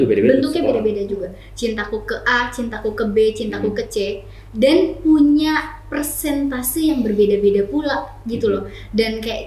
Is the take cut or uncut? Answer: uncut